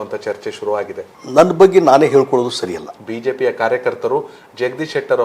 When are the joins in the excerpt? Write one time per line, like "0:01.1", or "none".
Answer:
0:01.1
0:02.9